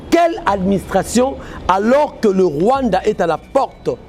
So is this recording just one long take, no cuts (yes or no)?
yes